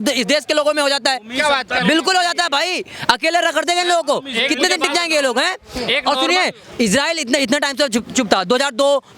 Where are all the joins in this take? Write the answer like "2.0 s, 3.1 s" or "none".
none